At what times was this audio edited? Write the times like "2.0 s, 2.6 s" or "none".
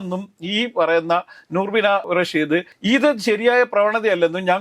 2.2 s